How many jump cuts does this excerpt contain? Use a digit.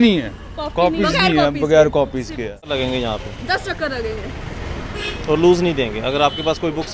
1